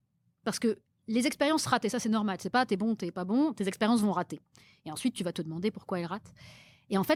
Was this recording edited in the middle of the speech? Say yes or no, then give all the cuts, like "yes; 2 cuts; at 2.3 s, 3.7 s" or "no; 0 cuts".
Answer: no; 0 cuts